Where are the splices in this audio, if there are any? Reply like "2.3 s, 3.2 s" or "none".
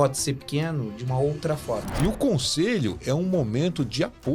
1.9 s